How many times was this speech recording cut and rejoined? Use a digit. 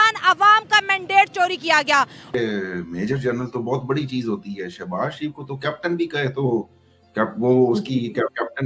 1